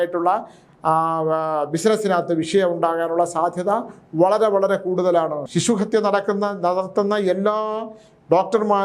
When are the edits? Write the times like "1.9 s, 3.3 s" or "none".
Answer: 5.4 s